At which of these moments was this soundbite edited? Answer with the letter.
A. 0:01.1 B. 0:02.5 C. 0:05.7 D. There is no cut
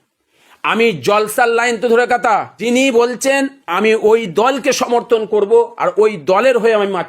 B